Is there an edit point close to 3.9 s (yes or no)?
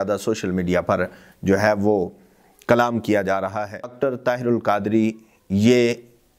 yes